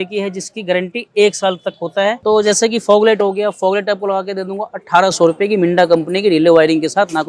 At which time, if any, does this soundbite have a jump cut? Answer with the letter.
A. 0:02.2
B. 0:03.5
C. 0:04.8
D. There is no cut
A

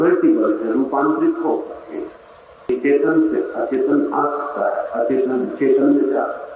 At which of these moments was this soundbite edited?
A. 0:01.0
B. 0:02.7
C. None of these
B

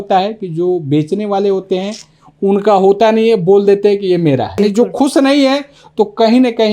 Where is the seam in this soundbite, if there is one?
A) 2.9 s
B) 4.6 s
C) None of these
B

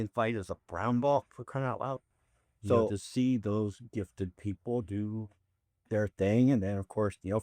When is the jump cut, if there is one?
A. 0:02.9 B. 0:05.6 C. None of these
A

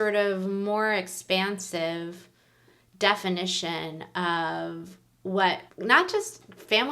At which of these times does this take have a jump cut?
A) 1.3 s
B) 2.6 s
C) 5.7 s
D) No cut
C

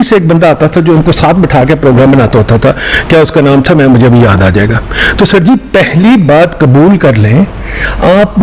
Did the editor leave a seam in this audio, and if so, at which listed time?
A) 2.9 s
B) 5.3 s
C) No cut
C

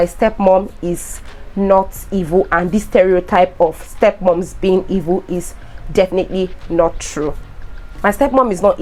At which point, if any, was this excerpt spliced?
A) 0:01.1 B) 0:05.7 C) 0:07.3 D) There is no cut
D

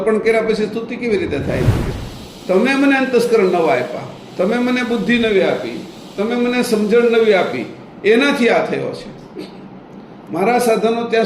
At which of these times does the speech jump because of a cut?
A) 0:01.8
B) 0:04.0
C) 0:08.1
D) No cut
A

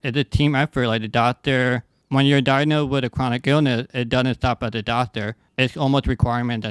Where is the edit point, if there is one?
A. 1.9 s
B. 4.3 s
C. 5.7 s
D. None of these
A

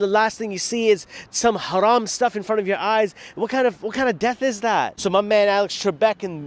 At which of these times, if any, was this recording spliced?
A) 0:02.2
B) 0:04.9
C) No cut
B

